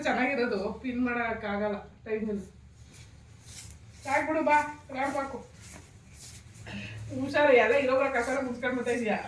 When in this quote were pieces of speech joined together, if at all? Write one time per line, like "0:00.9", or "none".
none